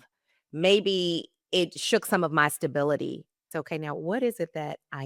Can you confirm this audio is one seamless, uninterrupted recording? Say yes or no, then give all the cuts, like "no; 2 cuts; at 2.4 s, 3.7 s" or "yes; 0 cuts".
no; 1 cut; at 3.5 s